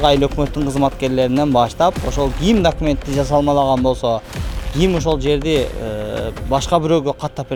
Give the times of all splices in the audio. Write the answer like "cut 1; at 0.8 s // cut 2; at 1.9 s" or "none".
none